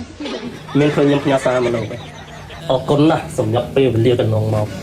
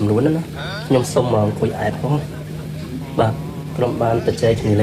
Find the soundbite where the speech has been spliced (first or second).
first